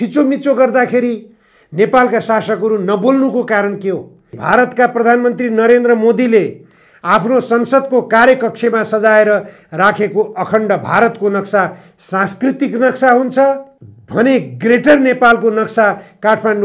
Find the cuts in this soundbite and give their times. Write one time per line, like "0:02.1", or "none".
0:04.4